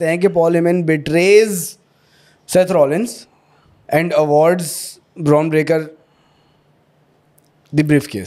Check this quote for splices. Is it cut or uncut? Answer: uncut